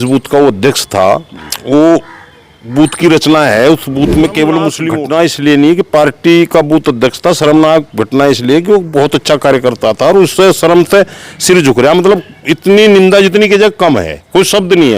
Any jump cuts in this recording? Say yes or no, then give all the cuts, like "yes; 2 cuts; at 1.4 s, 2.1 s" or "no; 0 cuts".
yes; 1 cut; at 4.8 s